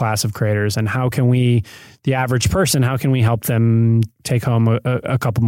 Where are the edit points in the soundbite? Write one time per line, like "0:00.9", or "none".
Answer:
0:04.1

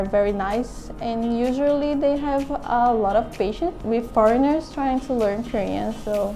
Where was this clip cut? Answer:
0:03.8

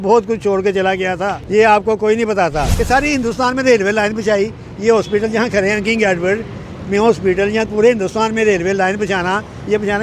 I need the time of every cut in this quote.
0:01.4
0:02.7

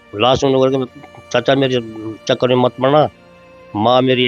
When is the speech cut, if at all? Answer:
none

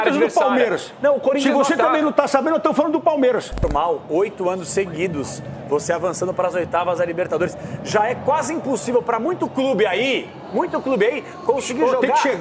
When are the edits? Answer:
0:03.6

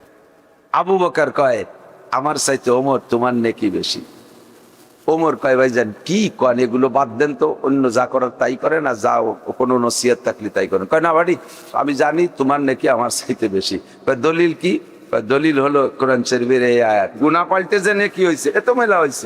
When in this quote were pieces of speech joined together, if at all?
0:17.2

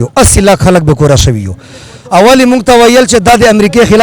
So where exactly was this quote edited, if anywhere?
none

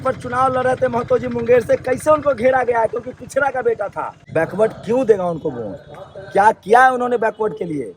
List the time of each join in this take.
0:04.2

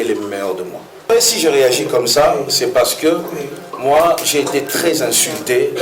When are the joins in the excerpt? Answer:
0:01.1

